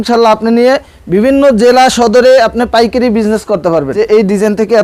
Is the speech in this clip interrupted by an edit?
yes; 1 cut; at 3.9 s

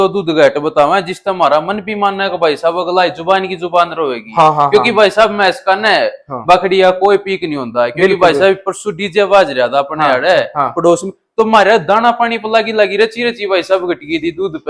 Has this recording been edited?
no; 0 cuts

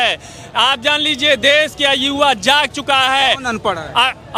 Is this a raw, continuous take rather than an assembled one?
yes; 0 cuts

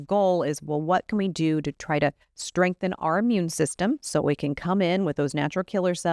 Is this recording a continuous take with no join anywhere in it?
yes; 0 cuts

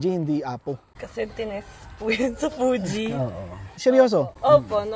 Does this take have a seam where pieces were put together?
no; 0 cuts

